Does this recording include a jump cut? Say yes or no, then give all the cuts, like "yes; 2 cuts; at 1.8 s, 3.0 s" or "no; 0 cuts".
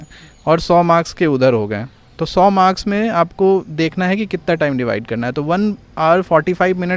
no; 0 cuts